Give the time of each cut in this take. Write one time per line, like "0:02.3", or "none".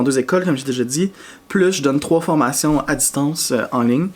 none